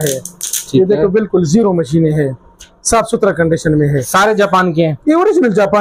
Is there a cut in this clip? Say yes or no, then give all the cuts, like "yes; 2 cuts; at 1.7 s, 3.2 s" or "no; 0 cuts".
no; 0 cuts